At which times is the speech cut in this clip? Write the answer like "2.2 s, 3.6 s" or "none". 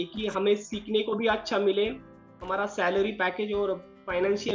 none